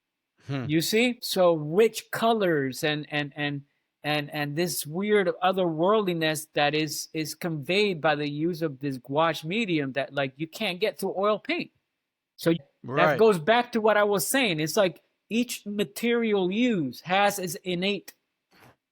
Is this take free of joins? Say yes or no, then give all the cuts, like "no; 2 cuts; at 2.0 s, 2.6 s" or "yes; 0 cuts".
no; 2 cuts; at 1.2 s, 12.6 s